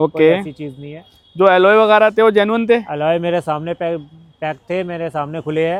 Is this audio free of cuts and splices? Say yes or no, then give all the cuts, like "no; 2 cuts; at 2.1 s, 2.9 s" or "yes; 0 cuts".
yes; 0 cuts